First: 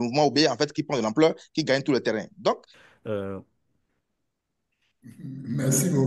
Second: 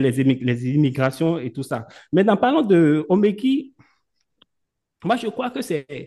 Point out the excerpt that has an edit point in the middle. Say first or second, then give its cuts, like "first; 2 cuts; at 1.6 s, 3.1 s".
first; 1 cut; at 2.7 s